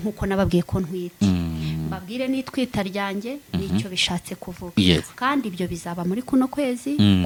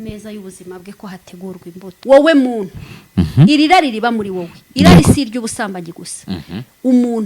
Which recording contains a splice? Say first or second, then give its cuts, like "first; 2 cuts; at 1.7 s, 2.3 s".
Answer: second; 1 cut; at 2.0 s